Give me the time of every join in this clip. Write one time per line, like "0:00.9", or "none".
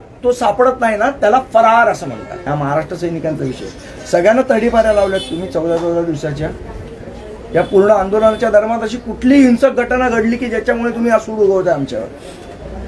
0:02.5